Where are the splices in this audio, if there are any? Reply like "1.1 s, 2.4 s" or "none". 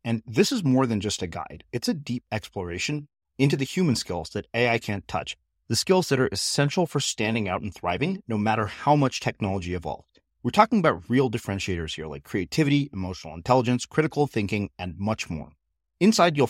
none